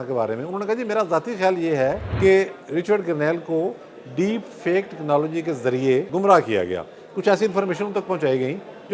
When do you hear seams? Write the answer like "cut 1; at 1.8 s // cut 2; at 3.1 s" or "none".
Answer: cut 1; at 2.1 s // cut 2; at 6.1 s